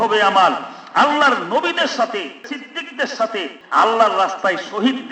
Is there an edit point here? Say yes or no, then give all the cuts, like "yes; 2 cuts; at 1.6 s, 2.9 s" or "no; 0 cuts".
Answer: yes; 2 cuts; at 2.5 s, 3.6 s